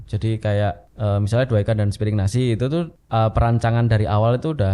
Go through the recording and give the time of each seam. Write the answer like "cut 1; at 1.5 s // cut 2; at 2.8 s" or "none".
cut 1; at 0.9 s // cut 2; at 3.0 s